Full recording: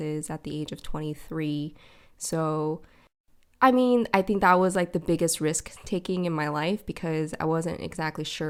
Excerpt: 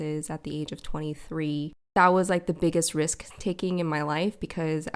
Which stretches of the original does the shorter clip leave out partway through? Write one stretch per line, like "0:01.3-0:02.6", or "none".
0:01.9-0:04.4